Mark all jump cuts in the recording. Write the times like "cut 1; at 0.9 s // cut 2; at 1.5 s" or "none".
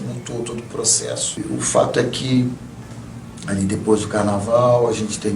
cut 1; at 1.4 s